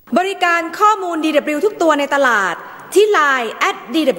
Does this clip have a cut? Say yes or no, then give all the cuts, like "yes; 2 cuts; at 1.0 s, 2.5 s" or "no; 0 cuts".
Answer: no; 0 cuts